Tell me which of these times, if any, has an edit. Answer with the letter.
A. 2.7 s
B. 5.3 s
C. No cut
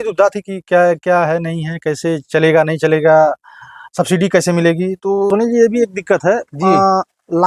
B